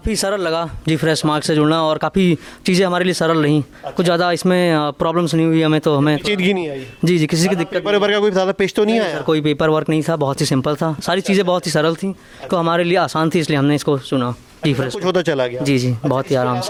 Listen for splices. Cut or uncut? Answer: uncut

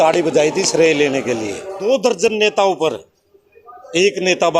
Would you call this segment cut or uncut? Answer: cut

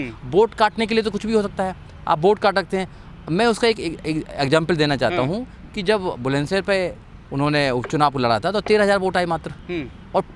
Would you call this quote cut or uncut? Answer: uncut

